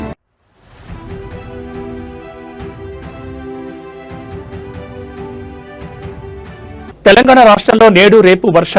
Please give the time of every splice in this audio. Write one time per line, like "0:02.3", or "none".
none